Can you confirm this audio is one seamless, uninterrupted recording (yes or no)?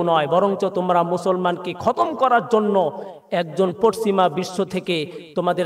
yes